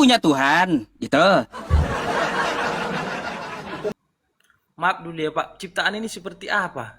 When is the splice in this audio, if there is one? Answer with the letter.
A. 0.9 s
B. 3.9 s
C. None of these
B